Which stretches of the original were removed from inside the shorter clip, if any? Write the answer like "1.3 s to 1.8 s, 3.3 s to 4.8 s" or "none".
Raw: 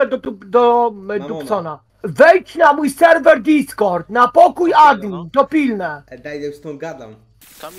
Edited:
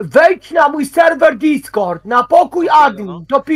none